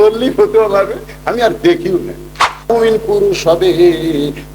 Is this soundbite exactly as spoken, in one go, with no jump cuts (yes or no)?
no